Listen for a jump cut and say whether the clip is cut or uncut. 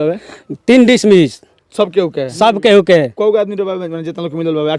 uncut